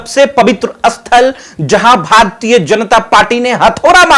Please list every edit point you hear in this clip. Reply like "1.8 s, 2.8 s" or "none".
none